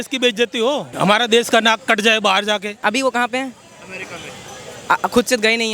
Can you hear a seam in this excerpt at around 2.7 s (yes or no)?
yes